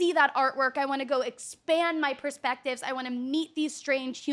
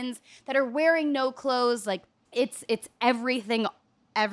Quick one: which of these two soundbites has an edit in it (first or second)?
second